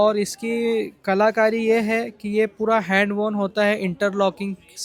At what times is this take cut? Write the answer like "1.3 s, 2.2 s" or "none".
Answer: none